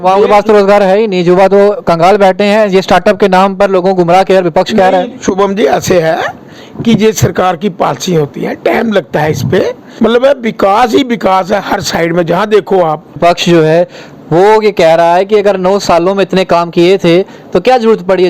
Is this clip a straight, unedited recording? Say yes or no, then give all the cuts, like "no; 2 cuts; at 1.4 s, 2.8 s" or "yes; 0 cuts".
no; 2 cuts; at 9.8 s, 13.2 s